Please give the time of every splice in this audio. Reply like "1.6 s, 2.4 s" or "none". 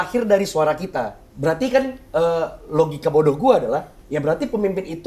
1.2 s